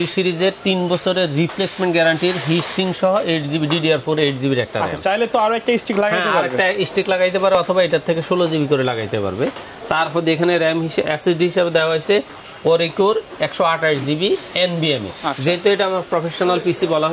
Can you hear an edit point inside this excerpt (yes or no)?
no